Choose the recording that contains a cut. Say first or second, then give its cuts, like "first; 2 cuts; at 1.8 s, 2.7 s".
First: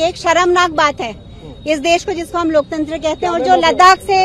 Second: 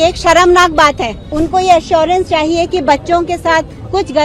second; 1 cut; at 1.3 s